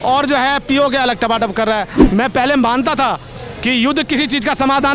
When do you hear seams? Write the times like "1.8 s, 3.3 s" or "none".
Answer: 1.9 s